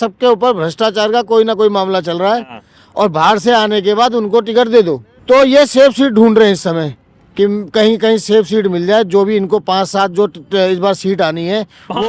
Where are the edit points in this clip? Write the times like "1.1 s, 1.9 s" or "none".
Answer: 5.1 s